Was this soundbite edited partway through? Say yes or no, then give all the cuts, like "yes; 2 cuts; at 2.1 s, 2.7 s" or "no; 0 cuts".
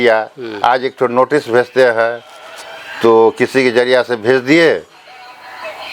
no; 0 cuts